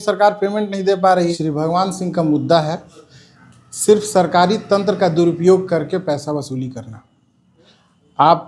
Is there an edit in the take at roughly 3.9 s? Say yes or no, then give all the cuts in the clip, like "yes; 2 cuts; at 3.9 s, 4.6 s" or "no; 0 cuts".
no; 1 cut; at 1.3 s